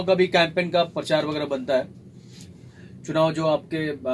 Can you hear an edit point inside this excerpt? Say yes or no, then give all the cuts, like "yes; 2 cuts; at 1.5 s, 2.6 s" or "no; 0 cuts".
yes; 1 cut; at 2.3 s